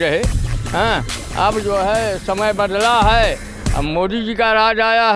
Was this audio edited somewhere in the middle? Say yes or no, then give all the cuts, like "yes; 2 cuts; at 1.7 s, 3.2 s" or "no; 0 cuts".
no; 0 cuts